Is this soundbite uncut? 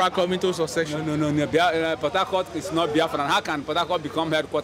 yes; 0 cuts

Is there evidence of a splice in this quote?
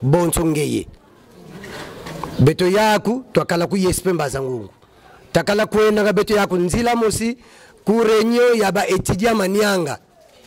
no; 0 cuts

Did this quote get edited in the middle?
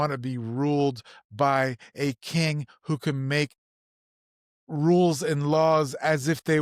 no; 0 cuts

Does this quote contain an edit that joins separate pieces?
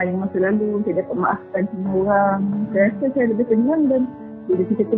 no; 0 cuts

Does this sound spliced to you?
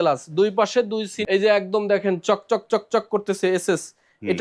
yes; 1 cut; at 1.1 s

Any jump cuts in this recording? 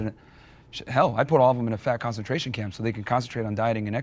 no; 0 cuts

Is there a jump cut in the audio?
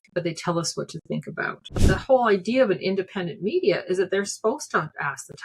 yes; 1 cut; at 1.8 s

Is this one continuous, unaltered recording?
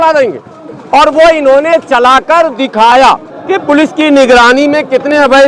no; 1 cut; at 3.3 s

